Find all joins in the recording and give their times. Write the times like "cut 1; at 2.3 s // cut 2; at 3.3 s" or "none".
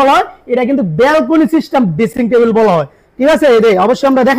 none